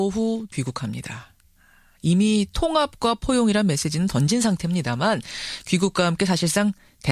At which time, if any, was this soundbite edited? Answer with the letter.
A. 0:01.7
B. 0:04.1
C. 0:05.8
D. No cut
C